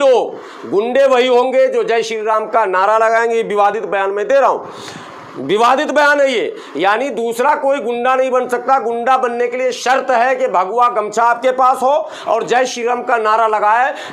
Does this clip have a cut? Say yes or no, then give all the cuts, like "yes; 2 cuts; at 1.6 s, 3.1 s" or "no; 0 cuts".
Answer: no; 0 cuts